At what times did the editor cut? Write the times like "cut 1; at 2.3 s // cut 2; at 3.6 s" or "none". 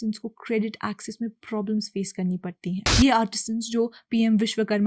cut 1; at 2.8 s